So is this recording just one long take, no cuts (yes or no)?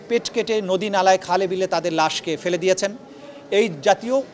yes